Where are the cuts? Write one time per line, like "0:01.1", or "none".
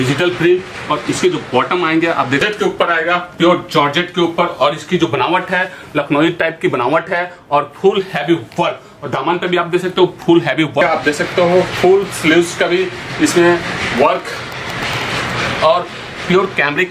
0:02.4
0:10.8